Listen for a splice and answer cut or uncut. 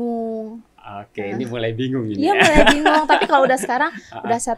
uncut